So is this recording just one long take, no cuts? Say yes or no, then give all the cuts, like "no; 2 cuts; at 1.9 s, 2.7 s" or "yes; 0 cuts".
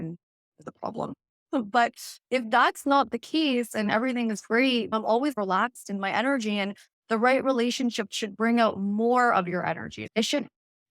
no; 1 cut; at 9.9 s